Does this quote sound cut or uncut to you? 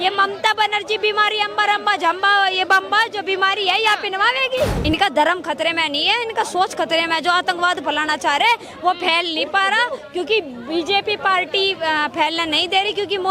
cut